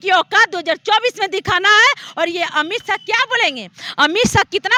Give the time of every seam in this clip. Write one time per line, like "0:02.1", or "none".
none